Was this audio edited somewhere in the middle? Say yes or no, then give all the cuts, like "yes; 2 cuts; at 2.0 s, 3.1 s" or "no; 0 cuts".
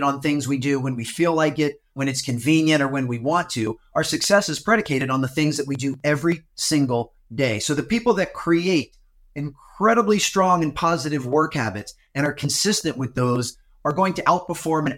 yes; 2 cuts; at 2.0 s, 6.5 s